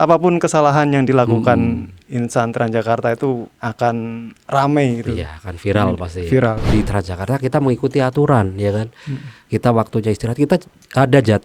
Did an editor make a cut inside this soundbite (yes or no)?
yes